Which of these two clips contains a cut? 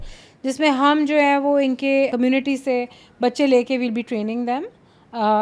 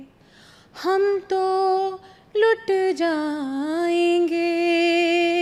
first; 1 cut; at 2.1 s

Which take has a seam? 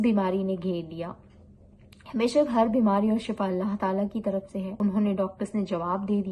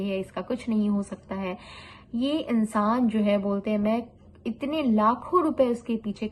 first; 1 cut; at 4.7 s

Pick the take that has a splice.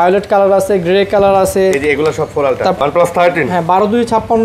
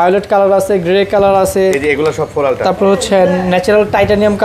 first; 1 cut; at 2.8 s

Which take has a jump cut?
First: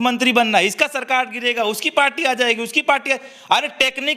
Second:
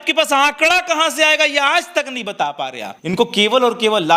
second; 1 cut; at 2.9 s

